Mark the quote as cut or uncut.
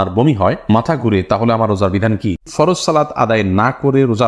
cut